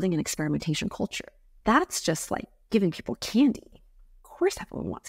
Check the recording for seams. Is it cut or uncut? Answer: cut